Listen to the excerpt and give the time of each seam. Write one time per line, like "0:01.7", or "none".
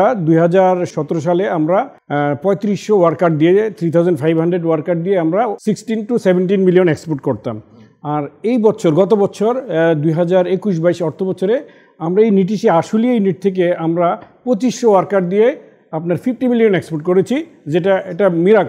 0:02.0
0:05.6